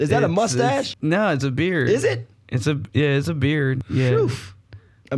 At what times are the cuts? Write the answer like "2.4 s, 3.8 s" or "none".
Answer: 0.9 s, 3.8 s